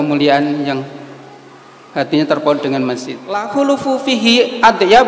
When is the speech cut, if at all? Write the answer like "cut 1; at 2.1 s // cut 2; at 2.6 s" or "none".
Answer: cut 1; at 3.3 s